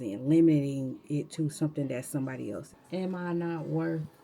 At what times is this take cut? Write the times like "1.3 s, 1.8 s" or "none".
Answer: 2.7 s